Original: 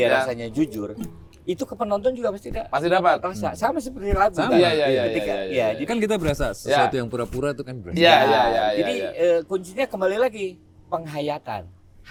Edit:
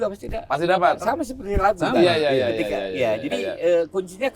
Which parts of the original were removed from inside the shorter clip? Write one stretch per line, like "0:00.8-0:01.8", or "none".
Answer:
0:03.2-0:03.6
0:05.9-0:08.9